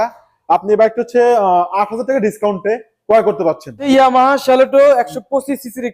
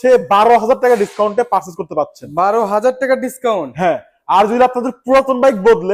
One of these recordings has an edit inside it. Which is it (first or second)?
first